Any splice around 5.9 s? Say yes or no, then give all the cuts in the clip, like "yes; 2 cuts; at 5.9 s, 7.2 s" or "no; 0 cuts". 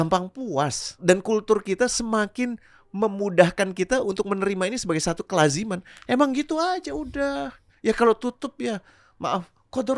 no; 2 cuts; at 1.0 s, 7.6 s